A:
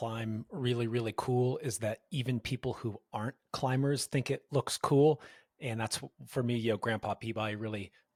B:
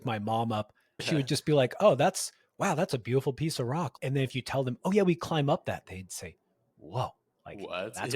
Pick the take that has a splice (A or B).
B